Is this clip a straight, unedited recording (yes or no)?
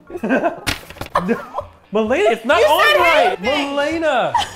no